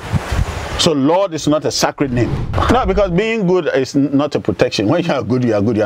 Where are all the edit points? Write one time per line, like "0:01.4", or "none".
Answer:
0:02.4